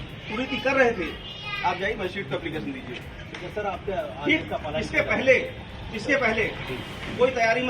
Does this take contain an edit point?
no; 0 cuts

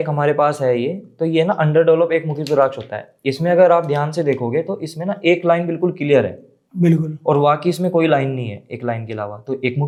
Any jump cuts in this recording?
no; 0 cuts

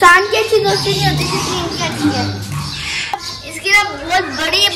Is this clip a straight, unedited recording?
no; 1 cut; at 3.1 s

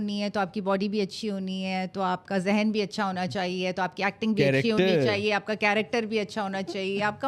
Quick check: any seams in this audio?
no; 0 cuts

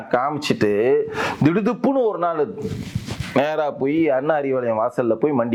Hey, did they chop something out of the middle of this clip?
no; 0 cuts

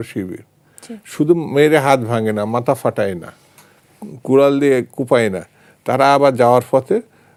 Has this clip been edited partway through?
no; 0 cuts

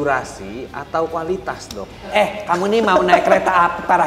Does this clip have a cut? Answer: yes; 1 cut; at 2.1 s

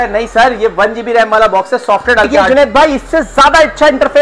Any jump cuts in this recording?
yes; 1 cut; at 2.4 s

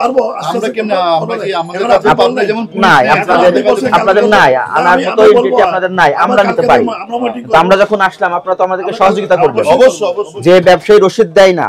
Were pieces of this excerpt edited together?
no; 0 cuts

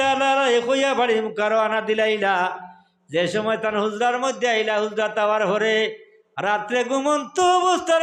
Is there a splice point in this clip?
no; 0 cuts

